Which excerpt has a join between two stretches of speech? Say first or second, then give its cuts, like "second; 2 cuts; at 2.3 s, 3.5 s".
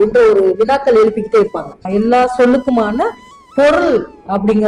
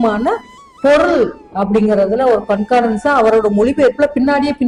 first; 1 cut; at 1.8 s